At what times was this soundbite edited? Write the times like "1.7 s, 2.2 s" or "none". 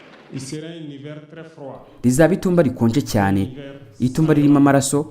1.9 s